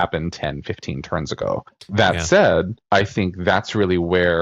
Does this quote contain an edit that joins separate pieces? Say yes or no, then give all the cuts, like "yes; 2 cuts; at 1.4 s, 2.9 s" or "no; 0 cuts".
yes; 2 cuts; at 1.8 s, 2.8 s